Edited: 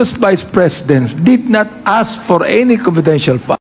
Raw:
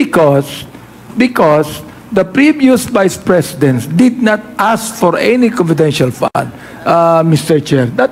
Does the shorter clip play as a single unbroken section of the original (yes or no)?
yes